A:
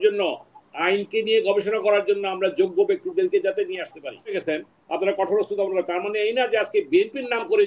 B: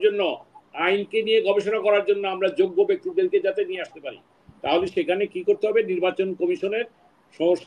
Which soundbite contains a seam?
A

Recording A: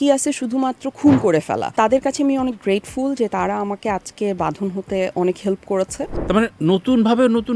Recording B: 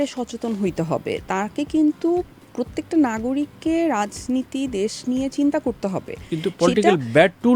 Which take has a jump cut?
A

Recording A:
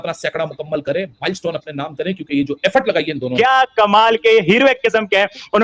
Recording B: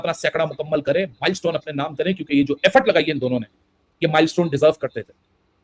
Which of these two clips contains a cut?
A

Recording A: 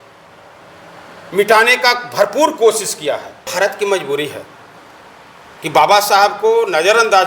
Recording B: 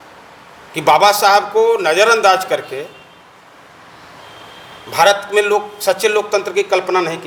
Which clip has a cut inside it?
A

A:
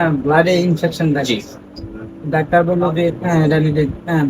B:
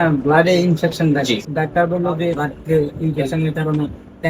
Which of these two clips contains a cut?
B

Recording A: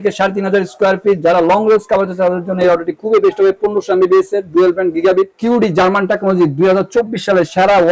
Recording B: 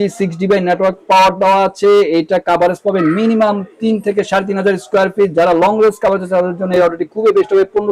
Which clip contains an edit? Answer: A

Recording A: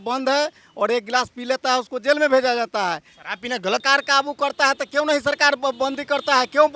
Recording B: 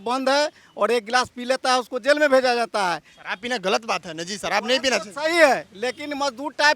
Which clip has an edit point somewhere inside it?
A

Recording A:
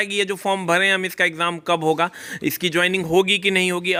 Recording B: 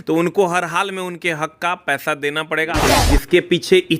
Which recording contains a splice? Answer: B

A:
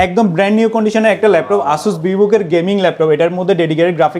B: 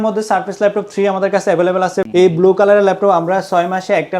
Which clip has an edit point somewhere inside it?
B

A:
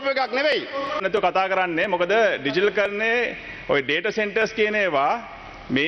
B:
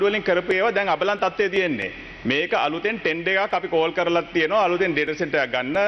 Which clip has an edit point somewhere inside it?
A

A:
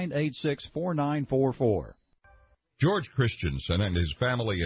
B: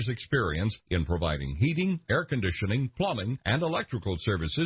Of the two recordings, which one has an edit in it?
A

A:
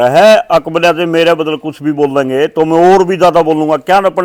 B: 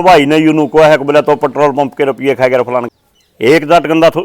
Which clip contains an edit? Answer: B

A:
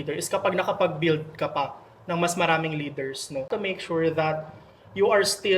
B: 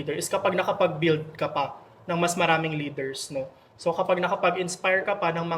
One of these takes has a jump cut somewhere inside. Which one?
A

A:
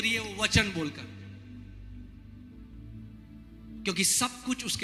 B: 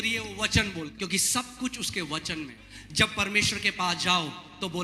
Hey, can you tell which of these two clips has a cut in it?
B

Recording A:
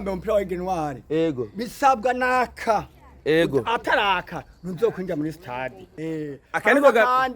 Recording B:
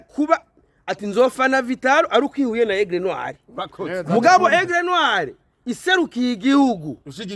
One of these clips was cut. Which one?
A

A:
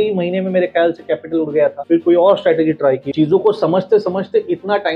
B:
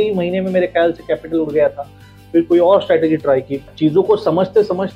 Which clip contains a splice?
A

